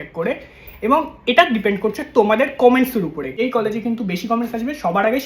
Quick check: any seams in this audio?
yes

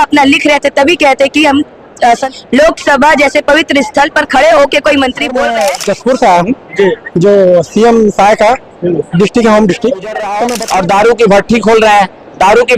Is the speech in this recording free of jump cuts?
no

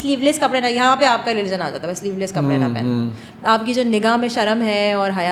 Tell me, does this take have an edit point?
no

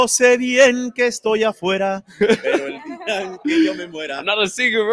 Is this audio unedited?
yes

